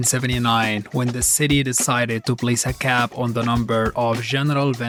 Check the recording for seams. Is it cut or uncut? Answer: uncut